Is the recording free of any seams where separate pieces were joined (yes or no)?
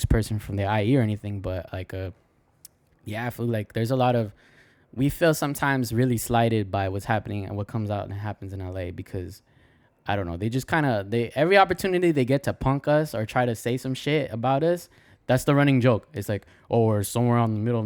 yes